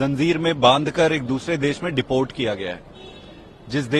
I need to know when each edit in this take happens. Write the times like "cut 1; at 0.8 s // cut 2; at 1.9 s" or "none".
none